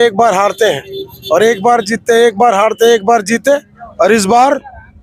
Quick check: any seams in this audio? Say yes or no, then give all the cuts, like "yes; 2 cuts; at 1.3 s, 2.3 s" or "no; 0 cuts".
no; 0 cuts